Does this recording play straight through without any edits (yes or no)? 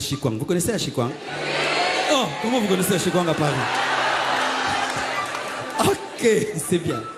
yes